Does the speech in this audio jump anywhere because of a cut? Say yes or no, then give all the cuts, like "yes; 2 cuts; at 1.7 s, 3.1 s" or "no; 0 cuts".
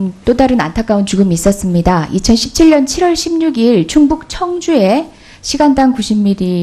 yes; 1 cut; at 5.1 s